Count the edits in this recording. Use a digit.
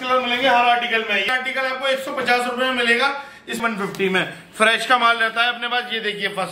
2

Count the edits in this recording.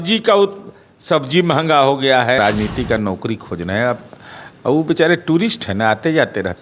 1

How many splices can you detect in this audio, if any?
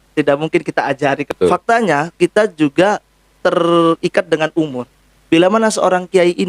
1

